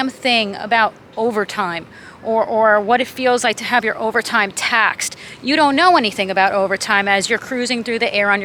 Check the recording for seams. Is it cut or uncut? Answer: uncut